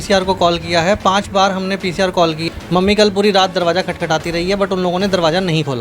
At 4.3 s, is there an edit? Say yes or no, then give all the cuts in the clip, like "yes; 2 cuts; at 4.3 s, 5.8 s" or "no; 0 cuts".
no; 1 cut; at 2.4 s